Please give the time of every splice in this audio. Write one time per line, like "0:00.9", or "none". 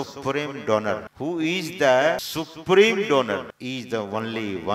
0:01.1
0:02.2
0:03.5